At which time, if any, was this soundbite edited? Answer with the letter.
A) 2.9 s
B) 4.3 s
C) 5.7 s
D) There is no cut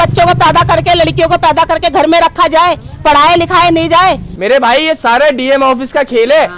B